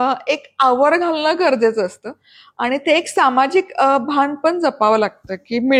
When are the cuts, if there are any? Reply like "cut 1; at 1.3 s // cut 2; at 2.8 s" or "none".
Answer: none